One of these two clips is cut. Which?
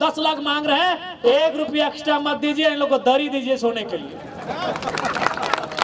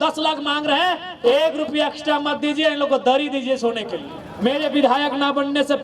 second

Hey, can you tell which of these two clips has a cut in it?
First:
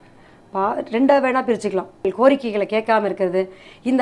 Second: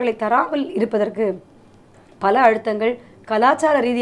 first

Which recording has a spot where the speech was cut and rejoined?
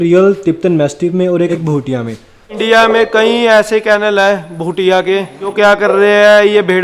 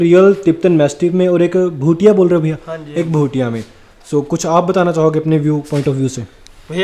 first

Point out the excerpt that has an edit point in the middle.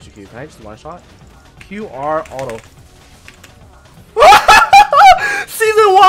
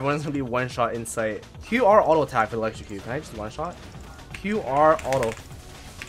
second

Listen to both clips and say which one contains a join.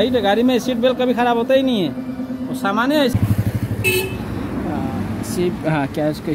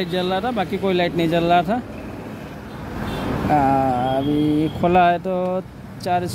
first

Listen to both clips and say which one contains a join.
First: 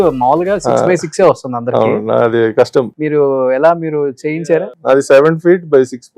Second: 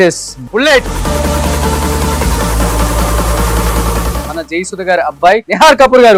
first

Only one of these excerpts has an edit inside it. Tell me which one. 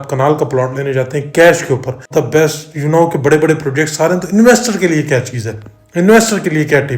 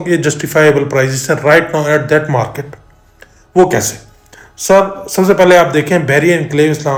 first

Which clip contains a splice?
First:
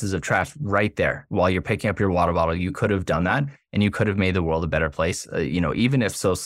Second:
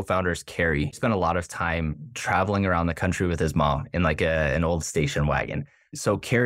second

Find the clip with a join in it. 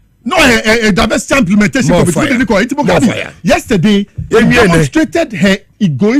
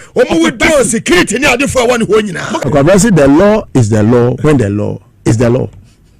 second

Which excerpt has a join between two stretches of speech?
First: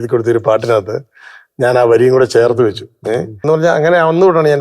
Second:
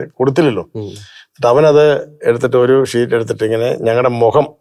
first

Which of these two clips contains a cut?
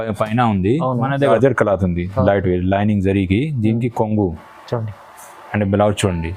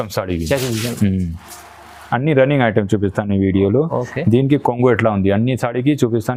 first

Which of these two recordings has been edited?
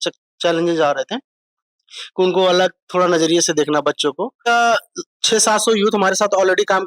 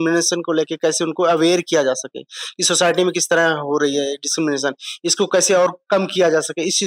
first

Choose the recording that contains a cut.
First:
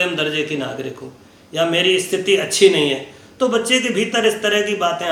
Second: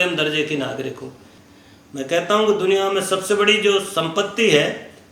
second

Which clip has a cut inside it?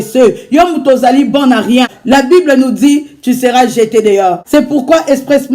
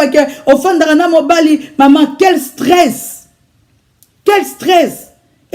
first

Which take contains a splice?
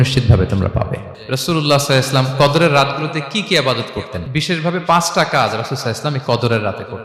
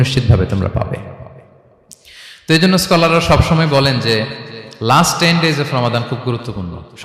first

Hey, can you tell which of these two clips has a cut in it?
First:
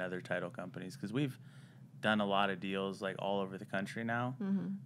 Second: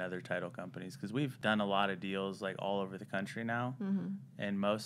second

